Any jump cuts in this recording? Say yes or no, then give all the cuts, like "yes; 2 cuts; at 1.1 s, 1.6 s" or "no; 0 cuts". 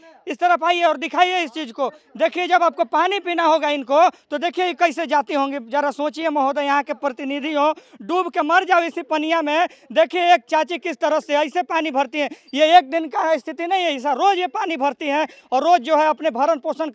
no; 0 cuts